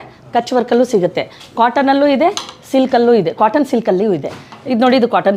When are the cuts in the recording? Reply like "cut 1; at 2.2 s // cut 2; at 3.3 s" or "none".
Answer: none

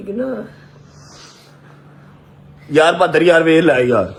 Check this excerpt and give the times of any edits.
none

